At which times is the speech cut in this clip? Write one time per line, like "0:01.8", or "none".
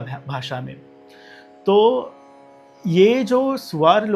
none